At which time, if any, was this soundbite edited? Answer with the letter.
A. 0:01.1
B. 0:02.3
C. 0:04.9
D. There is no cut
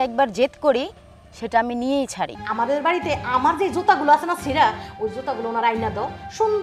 B